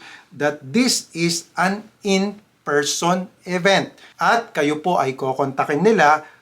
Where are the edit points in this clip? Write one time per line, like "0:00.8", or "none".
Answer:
0:04.0